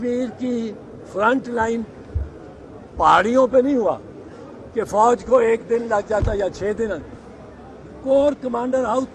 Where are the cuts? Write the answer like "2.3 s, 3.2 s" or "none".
none

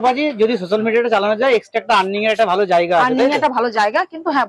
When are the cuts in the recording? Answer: none

